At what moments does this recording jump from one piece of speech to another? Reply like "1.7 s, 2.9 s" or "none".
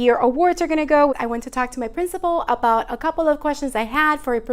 1.2 s